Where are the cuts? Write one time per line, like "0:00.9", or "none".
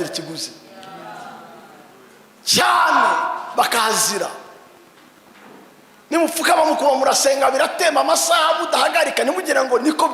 none